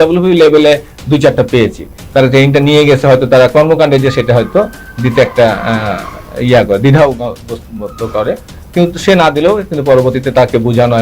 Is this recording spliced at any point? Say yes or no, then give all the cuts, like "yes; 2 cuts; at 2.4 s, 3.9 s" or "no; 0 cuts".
no; 0 cuts